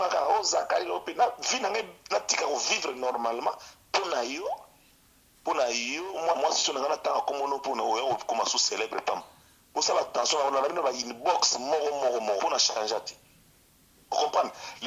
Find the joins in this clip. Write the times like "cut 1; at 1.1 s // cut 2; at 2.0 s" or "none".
none